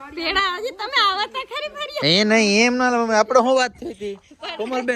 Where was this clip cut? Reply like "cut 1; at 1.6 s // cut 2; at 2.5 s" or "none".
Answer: none